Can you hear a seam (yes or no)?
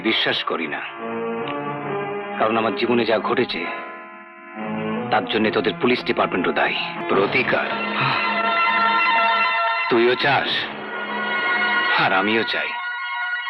yes